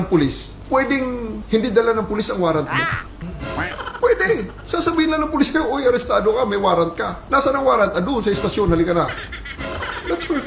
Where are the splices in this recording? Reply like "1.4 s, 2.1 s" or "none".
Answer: none